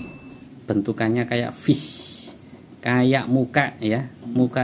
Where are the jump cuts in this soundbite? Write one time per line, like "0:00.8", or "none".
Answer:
none